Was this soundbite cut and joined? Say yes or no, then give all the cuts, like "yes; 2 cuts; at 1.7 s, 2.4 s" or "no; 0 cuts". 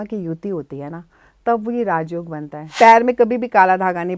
yes; 1 cut; at 2.7 s